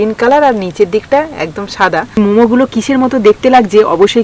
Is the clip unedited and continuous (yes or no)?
yes